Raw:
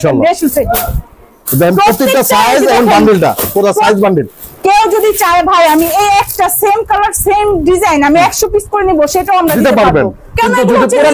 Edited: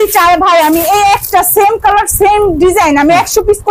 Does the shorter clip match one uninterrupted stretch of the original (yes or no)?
yes